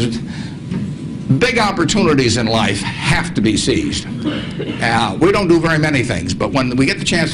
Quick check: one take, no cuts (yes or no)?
yes